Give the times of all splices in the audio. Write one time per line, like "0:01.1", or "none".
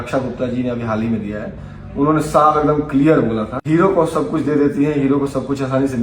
0:03.5